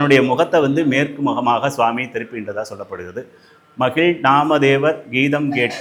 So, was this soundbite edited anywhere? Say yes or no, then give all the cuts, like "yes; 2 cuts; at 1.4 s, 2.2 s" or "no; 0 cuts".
no; 0 cuts